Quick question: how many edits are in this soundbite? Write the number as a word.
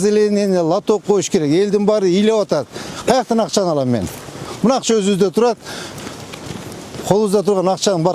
zero